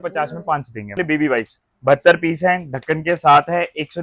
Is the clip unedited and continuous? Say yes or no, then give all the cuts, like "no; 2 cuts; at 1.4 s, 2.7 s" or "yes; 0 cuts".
no; 1 cut; at 0.9 s